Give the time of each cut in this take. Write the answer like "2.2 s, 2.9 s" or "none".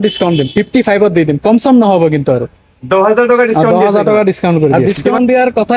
4.8 s